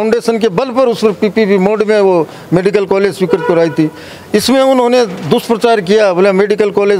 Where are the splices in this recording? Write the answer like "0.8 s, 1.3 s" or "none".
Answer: none